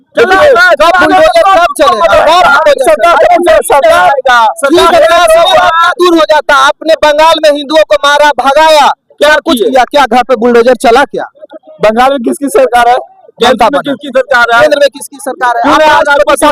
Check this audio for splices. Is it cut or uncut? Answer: uncut